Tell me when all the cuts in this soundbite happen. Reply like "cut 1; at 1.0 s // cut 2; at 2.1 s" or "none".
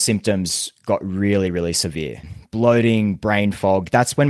cut 1; at 2.3 s